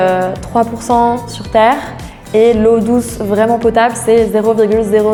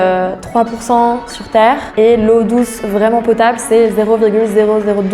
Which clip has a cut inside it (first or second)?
second